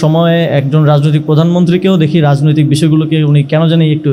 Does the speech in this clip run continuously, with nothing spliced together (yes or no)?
yes